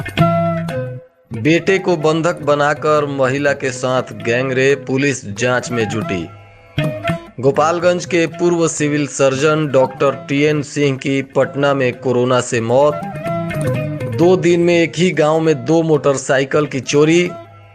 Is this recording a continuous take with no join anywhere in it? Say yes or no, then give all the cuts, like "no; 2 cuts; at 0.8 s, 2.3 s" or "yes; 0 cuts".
no; 1 cut; at 0.9 s